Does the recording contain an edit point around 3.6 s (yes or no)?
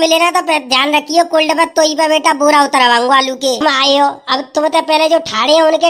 yes